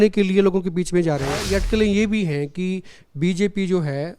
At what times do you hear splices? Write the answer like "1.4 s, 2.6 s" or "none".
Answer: 1.4 s